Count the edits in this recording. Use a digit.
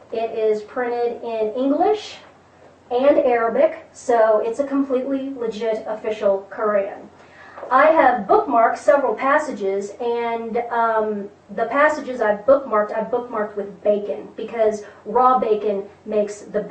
1